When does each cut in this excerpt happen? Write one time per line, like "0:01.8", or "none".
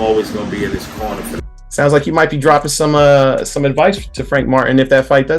0:01.5